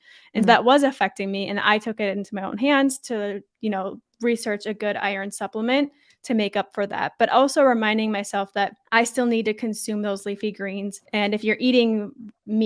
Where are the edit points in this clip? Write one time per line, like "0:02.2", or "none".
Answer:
0:08.8
0:11.0